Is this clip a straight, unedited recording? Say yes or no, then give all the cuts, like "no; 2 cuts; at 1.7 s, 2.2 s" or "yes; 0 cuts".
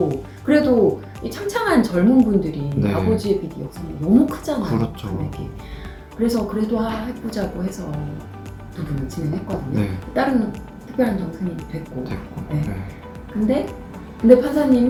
yes; 0 cuts